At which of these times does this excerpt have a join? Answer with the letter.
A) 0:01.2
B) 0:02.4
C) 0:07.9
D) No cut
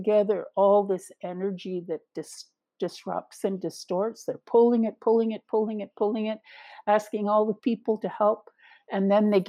D